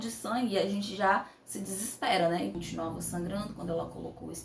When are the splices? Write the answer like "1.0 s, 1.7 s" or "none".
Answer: 2.5 s